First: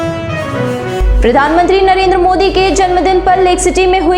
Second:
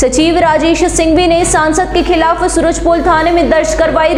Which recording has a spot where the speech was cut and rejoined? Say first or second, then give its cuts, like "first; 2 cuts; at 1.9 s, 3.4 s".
first; 1 cut; at 1.0 s